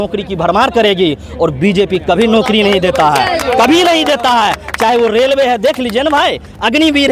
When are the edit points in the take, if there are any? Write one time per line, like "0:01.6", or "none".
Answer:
none

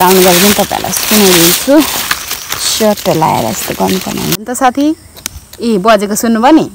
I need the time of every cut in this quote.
0:04.4

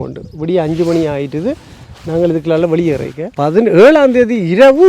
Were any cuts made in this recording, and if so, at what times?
0:03.2

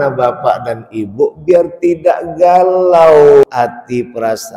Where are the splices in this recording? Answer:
0:03.4

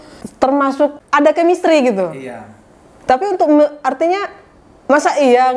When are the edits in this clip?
0:01.0

